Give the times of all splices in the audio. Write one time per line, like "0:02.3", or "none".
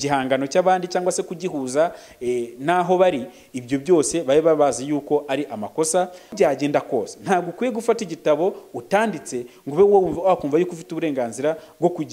0:06.3